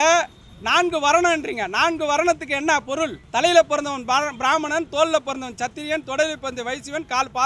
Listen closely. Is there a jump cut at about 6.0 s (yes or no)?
no